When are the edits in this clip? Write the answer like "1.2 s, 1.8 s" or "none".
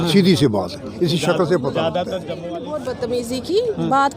2.5 s